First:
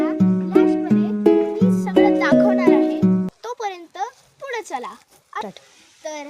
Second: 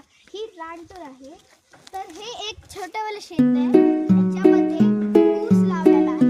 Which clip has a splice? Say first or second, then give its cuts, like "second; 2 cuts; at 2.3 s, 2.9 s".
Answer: first; 1 cut; at 3.2 s